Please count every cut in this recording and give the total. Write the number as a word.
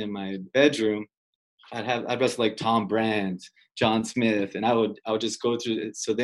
one